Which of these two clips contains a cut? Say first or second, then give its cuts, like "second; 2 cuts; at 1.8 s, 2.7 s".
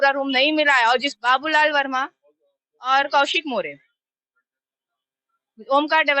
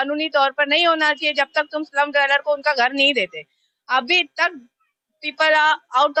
first; 1 cut; at 1.1 s